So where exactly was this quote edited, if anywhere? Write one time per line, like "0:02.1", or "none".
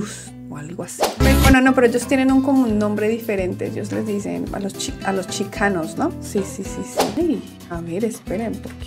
0:01.2
0:07.1